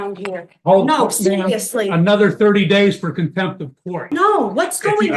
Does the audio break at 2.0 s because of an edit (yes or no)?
no